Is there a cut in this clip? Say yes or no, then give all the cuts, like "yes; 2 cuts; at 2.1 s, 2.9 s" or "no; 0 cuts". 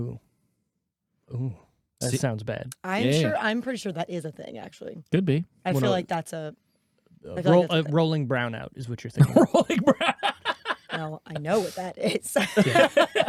no; 0 cuts